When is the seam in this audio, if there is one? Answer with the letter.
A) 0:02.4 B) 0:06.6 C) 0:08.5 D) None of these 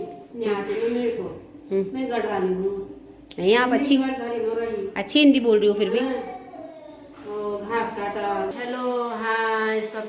C